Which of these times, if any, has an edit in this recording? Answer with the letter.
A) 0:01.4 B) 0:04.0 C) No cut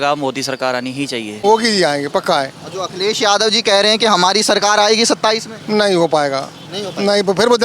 A